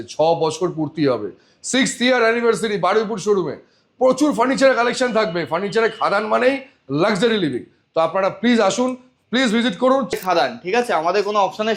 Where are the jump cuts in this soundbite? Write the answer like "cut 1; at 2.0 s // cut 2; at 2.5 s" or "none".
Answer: cut 1; at 10.1 s